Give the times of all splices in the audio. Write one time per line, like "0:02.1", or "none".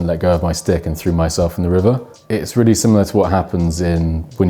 0:02.1